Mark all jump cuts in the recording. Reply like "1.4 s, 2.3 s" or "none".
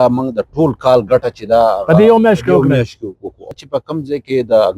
3.6 s